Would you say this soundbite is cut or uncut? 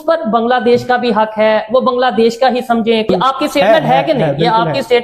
cut